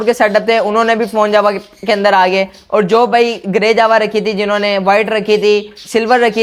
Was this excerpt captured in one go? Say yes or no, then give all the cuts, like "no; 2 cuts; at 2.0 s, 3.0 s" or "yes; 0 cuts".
yes; 0 cuts